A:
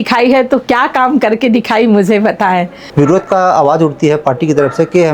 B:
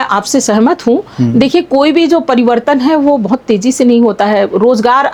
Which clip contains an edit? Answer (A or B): A